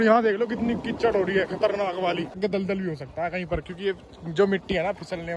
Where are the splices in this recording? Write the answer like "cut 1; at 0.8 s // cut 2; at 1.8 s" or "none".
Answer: cut 1; at 2.4 s